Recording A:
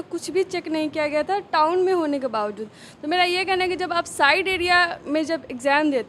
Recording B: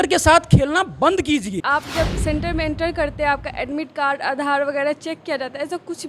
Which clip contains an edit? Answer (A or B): B